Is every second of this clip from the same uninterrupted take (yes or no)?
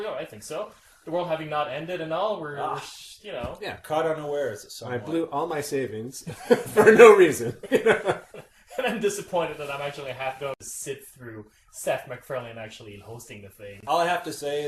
no